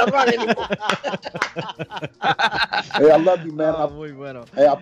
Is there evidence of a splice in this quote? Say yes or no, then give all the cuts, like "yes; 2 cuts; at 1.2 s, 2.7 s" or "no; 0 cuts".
no; 0 cuts